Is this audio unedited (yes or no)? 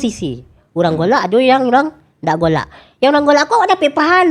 yes